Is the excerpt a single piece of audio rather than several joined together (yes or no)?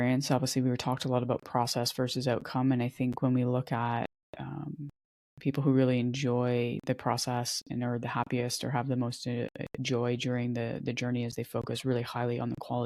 yes